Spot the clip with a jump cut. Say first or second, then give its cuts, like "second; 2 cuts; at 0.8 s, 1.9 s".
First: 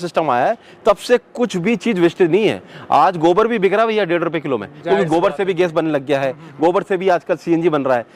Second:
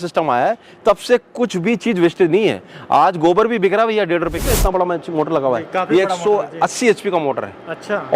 second; 1 cut; at 4.4 s